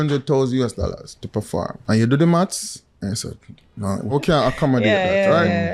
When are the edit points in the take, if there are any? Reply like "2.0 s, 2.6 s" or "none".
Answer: 1.8 s, 4.0 s